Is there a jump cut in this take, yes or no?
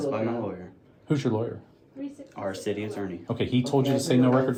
no